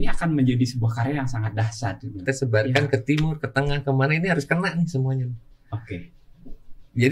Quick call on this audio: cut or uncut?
cut